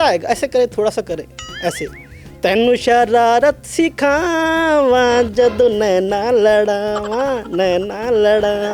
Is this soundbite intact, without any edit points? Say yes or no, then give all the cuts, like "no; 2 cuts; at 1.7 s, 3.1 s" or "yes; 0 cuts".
yes; 0 cuts